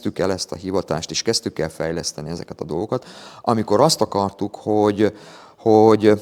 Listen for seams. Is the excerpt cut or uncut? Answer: uncut